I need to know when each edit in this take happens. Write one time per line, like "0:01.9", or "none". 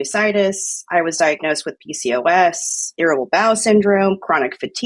0:02.9